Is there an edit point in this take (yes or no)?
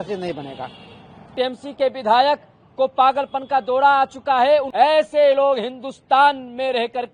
yes